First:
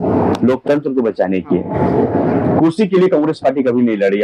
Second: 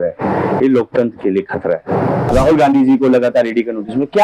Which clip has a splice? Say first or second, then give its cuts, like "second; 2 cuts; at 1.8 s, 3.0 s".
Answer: second; 1 cut; at 2.3 s